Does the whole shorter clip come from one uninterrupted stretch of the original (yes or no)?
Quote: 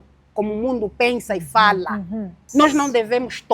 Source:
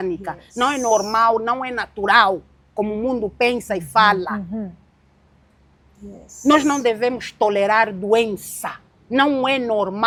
no